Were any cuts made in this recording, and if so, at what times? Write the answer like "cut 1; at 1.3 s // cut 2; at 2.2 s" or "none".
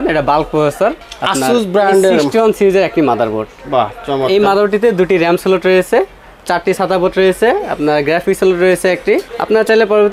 cut 1; at 1.0 s // cut 2; at 9.3 s